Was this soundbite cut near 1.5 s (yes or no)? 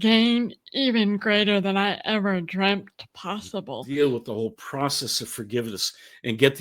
no